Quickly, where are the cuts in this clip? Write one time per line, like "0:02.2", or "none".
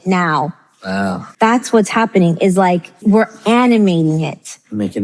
0:01.2
0:03.0